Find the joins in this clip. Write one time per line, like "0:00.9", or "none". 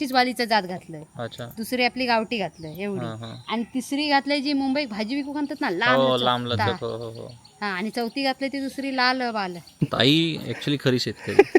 0:09.6